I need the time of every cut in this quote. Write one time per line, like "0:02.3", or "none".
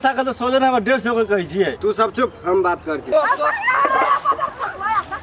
0:01.7
0:03.0